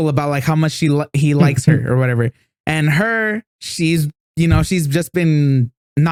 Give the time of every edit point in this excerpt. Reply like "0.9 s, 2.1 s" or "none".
none